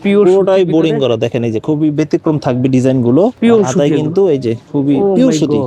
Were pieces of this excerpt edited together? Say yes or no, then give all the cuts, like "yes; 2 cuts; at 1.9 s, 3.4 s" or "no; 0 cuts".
yes; 2 cuts; at 3.4 s, 4.6 s